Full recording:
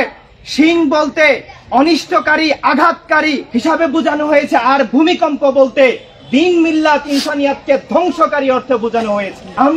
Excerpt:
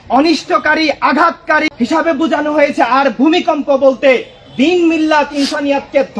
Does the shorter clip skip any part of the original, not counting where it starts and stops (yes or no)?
yes